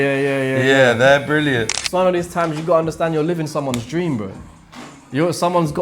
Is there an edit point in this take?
yes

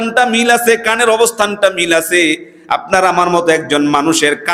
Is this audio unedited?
yes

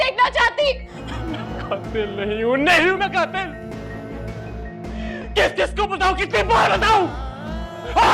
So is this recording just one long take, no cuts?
no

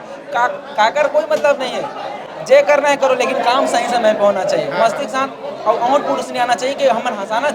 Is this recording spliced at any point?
no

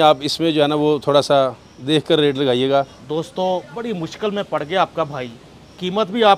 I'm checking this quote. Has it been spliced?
yes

